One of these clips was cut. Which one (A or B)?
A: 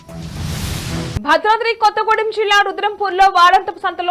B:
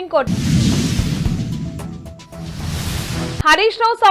A